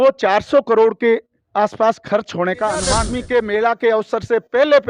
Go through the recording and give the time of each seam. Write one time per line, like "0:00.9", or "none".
0:03.1